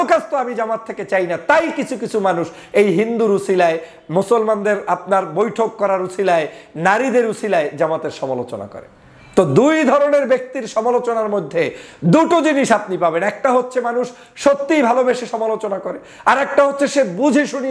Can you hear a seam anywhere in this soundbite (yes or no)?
no